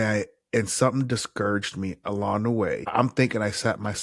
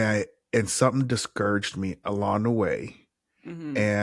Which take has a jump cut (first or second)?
first